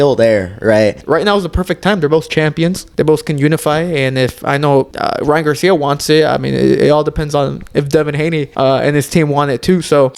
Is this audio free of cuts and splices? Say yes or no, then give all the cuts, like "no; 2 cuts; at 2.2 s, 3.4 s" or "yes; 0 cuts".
no; 4 cuts; at 1.0 s, 2.8 s, 4.9 s, 8.5 s